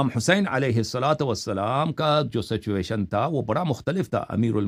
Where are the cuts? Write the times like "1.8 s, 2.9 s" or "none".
none